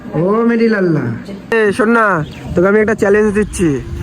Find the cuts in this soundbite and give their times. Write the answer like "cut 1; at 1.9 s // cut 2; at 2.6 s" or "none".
cut 1; at 1.5 s

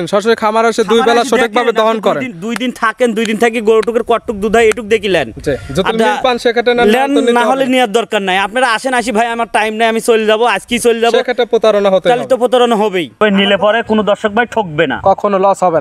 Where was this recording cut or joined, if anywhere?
cut 1; at 13.2 s

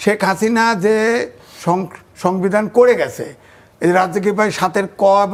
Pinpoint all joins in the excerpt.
none

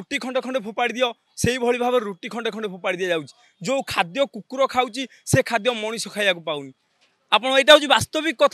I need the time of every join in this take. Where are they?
none

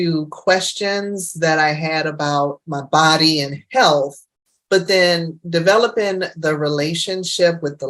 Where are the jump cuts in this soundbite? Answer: cut 1; at 2.7 s

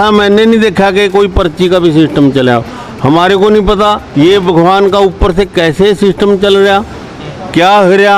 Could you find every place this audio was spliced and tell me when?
cut 1; at 4.0 s

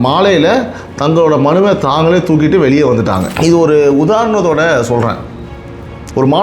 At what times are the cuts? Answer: cut 1; at 3.3 s

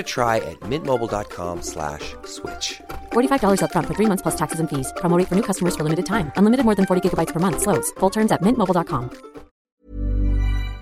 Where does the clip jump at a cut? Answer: cut 1; at 9.5 s

